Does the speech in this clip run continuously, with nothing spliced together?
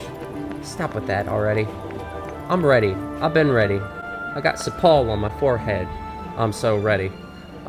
yes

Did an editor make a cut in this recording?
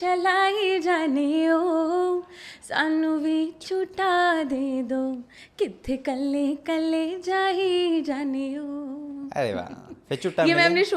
no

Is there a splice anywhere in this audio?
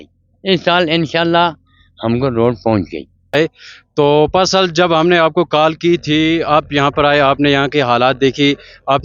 yes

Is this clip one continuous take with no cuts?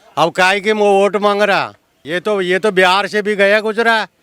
no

